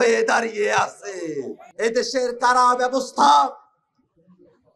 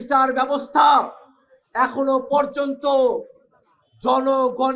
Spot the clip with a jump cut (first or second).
first